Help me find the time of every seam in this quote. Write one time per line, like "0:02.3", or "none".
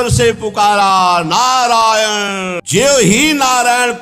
0:02.6